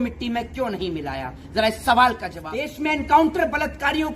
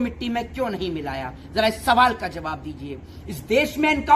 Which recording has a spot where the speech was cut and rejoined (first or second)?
first